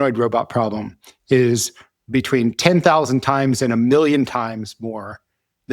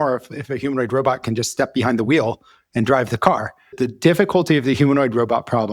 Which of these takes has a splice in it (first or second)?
second